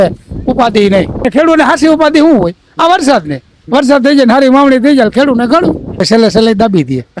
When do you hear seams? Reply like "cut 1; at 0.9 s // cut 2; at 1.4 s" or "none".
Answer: cut 1; at 1.3 s // cut 2; at 6.0 s